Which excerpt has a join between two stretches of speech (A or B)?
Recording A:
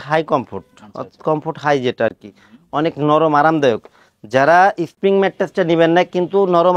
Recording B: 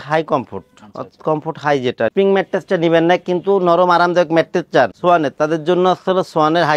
B